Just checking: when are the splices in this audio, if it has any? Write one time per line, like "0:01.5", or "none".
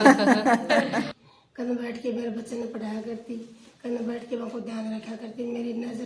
0:01.2